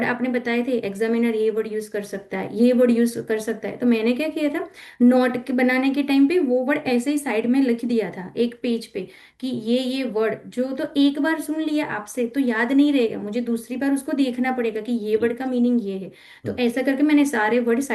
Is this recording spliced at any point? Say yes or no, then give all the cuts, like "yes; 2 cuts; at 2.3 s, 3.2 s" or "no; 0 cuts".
no; 0 cuts